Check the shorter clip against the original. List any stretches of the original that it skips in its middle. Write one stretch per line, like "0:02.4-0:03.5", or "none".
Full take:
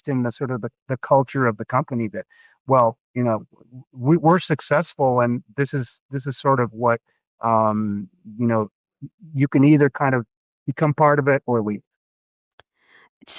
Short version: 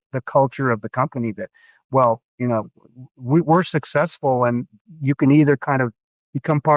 0:05.5-0:09.0